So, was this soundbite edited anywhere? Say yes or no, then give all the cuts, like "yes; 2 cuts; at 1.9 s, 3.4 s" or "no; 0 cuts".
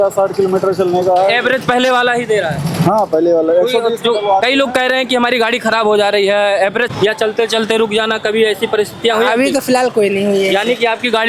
yes; 1 cut; at 6.9 s